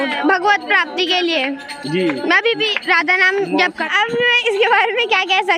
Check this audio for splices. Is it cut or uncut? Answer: cut